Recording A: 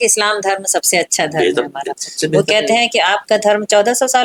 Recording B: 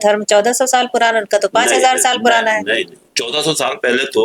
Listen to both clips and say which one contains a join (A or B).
B